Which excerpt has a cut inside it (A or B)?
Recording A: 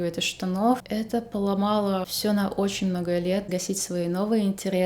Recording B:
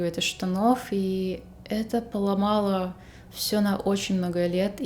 A